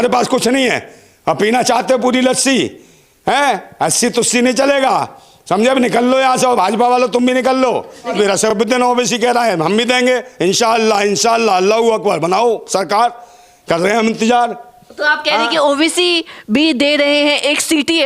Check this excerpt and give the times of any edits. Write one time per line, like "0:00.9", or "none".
0:08.4